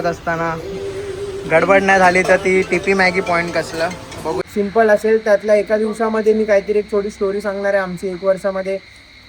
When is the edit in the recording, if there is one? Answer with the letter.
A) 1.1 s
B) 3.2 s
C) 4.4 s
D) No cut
C